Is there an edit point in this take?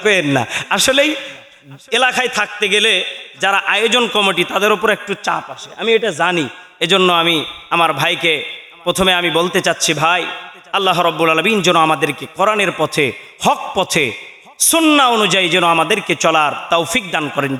no; 0 cuts

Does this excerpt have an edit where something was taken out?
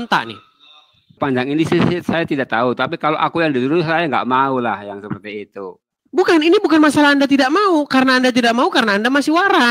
yes; 1 cut; at 1.2 s

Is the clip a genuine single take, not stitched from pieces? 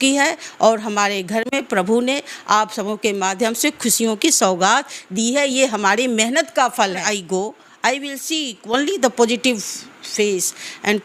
no; 1 cut; at 7.0 s

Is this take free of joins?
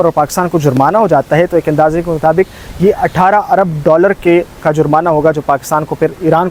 yes; 0 cuts

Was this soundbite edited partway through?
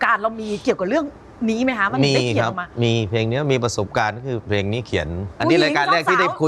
yes; 1 cut; at 5.2 s

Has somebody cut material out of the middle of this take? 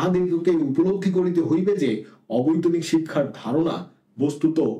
no; 0 cuts

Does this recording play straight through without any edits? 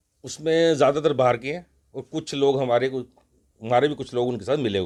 yes; 0 cuts

